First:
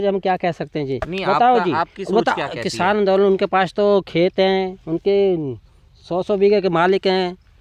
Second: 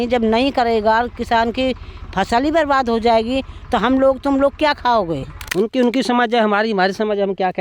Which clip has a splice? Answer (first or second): second